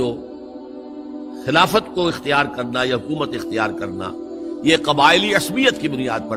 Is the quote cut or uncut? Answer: uncut